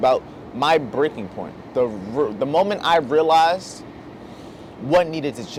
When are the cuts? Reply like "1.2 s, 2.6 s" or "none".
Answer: none